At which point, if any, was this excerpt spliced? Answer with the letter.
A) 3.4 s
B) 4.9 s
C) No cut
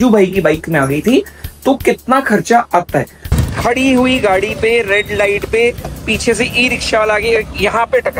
A